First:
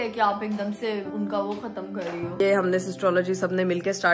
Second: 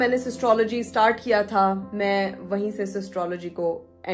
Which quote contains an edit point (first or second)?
first